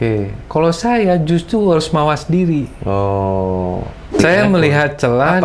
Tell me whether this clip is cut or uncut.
cut